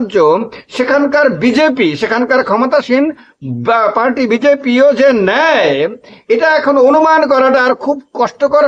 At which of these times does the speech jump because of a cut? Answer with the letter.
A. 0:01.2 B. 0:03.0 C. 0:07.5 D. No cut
D